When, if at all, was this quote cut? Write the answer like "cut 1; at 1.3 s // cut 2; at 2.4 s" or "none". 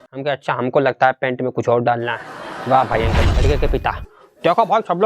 cut 1; at 3.3 s